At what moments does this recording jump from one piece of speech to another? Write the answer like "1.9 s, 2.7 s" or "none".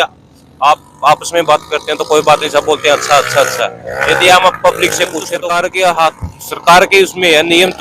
5.3 s

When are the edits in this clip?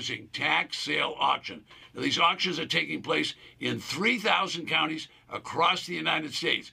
none

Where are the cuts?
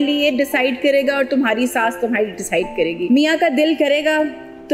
3.1 s

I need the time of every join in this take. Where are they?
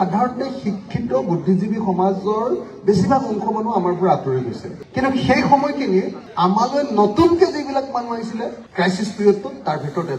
none

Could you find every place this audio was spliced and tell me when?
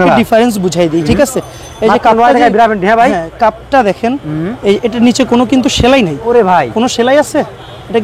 none

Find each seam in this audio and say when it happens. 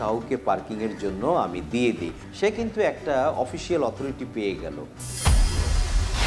5.2 s

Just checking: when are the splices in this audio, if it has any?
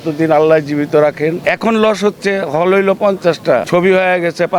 1.4 s, 3.7 s

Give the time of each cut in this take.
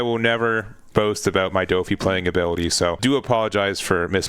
3.0 s

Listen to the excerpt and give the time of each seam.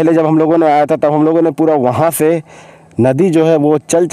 none

